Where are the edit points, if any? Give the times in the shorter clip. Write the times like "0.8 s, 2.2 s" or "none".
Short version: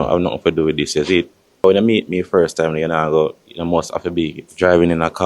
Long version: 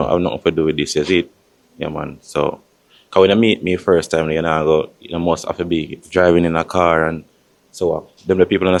1.6 s